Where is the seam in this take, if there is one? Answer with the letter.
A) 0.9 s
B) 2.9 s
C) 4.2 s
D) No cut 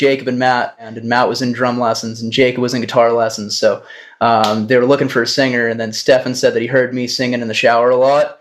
A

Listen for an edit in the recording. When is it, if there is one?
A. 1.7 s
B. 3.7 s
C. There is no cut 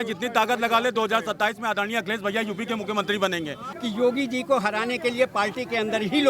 B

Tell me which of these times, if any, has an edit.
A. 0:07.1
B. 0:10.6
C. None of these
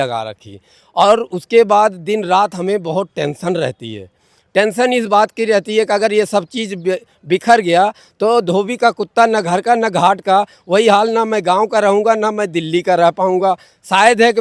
C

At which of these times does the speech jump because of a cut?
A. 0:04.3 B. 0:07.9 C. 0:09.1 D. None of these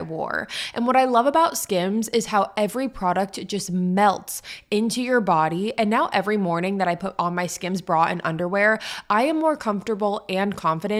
D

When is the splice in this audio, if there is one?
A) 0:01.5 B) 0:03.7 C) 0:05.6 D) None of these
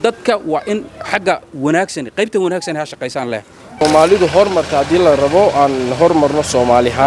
B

